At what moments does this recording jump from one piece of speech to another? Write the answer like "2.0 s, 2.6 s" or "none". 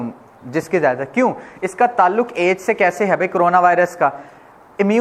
none